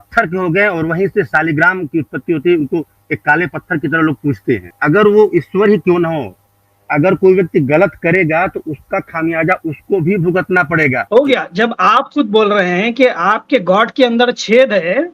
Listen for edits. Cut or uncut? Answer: cut